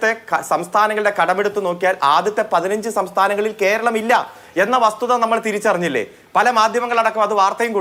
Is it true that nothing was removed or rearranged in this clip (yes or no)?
yes